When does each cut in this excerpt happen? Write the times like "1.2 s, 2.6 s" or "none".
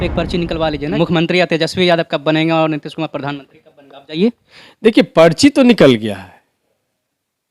0.9 s